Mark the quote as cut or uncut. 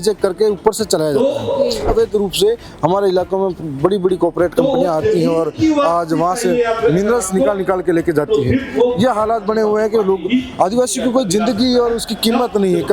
cut